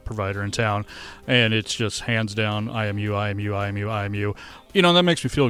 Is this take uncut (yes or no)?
no